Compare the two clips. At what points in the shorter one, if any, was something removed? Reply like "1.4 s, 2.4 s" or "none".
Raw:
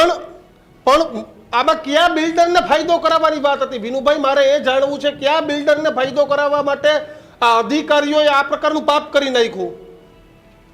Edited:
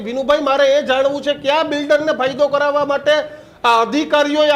none